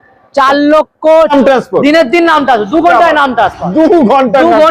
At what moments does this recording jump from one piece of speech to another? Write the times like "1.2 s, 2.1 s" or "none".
1.3 s